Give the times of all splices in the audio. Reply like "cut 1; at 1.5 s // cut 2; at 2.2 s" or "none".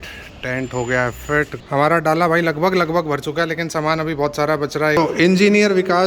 cut 1; at 1.6 s // cut 2; at 5.0 s